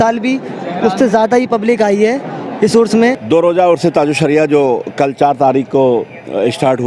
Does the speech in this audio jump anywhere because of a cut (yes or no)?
yes